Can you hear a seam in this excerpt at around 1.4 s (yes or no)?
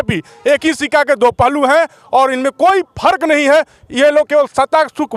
no